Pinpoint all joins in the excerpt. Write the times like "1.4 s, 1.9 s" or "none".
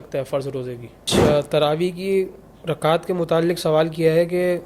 1.0 s